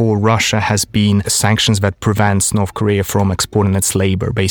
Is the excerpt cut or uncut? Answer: cut